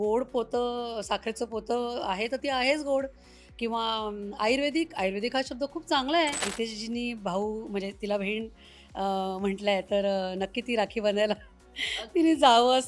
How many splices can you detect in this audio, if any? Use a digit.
1